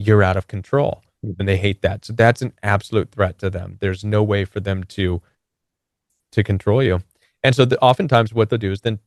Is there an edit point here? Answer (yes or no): no